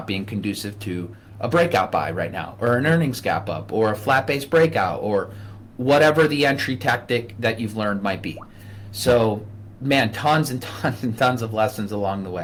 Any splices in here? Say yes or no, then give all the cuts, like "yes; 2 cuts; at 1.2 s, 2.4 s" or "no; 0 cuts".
no; 0 cuts